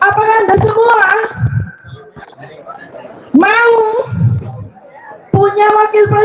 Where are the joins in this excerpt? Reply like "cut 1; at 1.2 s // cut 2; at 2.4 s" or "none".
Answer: none